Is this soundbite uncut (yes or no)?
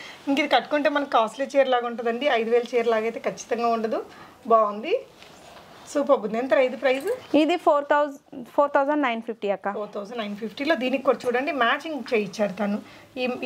yes